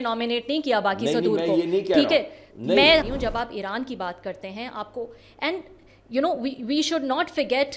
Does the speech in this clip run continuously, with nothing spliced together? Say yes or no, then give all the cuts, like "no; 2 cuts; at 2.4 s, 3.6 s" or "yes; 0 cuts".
no; 1 cut; at 3.1 s